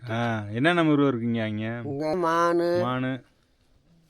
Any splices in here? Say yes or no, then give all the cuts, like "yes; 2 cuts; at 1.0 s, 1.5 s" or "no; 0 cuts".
yes; 1 cut; at 2.1 s